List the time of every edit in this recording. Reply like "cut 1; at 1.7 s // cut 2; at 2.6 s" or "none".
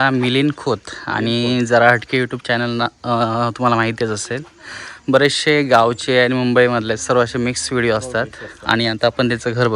none